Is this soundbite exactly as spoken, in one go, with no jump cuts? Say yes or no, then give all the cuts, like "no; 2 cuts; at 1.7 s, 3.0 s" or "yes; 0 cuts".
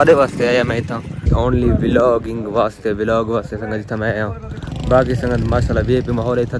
no; 1 cut; at 1.3 s